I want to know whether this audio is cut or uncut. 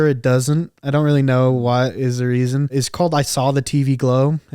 cut